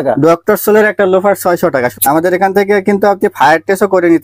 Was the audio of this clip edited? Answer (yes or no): yes